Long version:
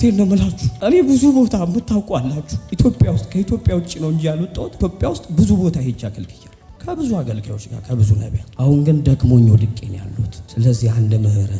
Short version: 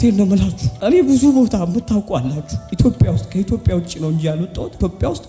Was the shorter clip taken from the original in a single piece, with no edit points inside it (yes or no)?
yes